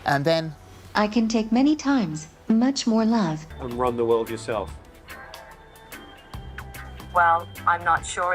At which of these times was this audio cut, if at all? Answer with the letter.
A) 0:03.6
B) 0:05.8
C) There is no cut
A